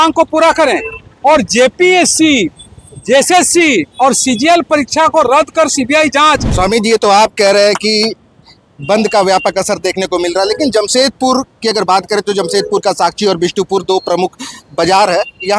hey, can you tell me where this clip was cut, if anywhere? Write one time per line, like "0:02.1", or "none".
0:06.5